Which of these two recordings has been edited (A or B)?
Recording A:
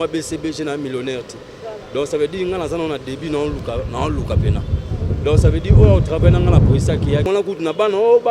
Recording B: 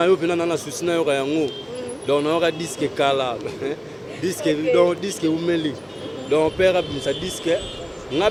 A